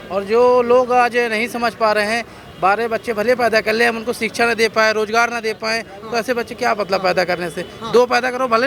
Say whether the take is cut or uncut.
uncut